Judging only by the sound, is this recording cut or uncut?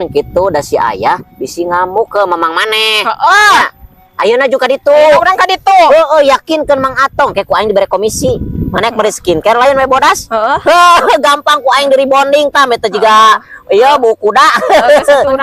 uncut